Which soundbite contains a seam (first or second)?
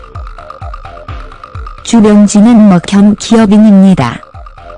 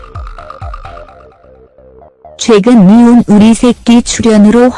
second